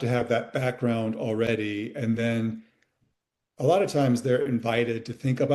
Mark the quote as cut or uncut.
uncut